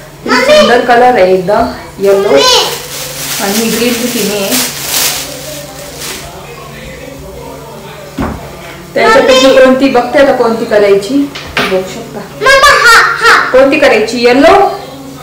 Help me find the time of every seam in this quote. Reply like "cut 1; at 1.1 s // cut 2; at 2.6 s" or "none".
none